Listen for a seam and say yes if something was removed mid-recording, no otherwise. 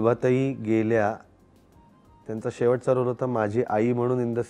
no